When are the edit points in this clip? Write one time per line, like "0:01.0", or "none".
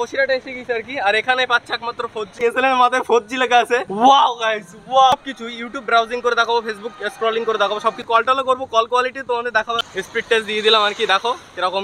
0:02.4
0:03.9
0:05.1
0:08.0
0:09.9